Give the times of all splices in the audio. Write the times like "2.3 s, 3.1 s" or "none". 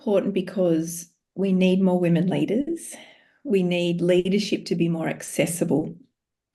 none